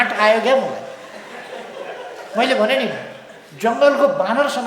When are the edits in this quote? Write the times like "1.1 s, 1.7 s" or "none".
none